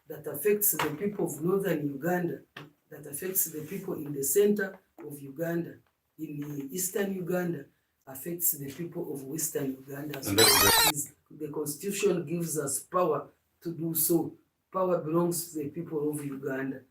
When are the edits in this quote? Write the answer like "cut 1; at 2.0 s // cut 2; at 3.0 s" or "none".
cut 1; at 10.7 s